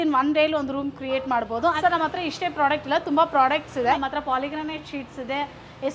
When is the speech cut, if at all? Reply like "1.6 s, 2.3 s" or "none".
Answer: 1.8 s, 4.0 s